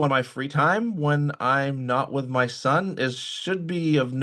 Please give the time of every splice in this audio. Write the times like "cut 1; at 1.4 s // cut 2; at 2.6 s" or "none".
none